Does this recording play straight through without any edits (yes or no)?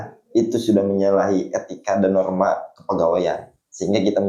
yes